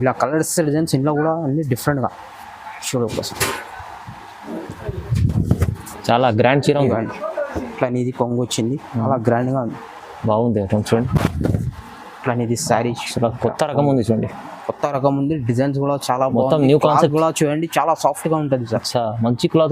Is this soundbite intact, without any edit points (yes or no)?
no